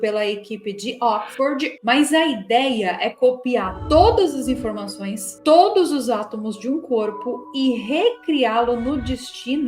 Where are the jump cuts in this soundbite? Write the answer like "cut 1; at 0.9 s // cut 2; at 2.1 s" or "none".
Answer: cut 1; at 1.7 s